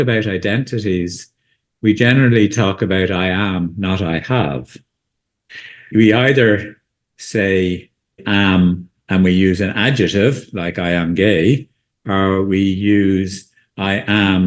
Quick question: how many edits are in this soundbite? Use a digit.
3